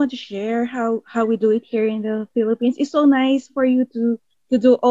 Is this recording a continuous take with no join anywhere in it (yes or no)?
yes